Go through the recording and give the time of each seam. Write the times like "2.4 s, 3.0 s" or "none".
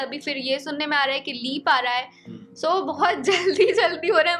none